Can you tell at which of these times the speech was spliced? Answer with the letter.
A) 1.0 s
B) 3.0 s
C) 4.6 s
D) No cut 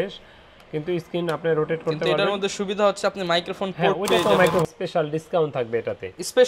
C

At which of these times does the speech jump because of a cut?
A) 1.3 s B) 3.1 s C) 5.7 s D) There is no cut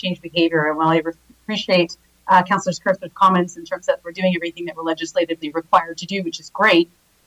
D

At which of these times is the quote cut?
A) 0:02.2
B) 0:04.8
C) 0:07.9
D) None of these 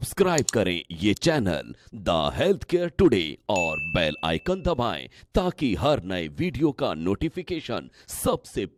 D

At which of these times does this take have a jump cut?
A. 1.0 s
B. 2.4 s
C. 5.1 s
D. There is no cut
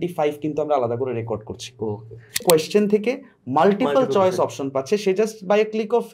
B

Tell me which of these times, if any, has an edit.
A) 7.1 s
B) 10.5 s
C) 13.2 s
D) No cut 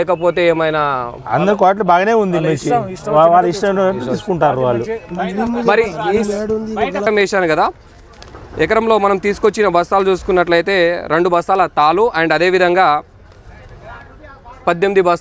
A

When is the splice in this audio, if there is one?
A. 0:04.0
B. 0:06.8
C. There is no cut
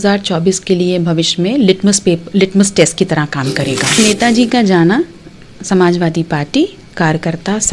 A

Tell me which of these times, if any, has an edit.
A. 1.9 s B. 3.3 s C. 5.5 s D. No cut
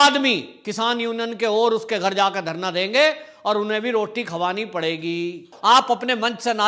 C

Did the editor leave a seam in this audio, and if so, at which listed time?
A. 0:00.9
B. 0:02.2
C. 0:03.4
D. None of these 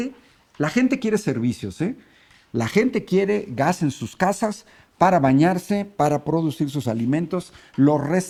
D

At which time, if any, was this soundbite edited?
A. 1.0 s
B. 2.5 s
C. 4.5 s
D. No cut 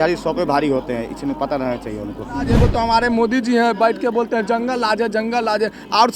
B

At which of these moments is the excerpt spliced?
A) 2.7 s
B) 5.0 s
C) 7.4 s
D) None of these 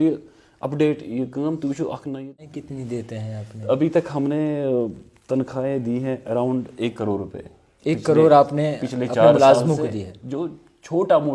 A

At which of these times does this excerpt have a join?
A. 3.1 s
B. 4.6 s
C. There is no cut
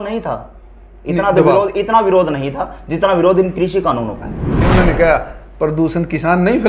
B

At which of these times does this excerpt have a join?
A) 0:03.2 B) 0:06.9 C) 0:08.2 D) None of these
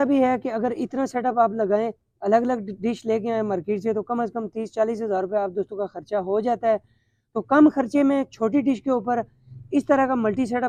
D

